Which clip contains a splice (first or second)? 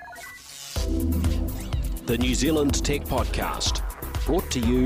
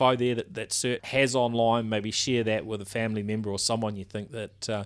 second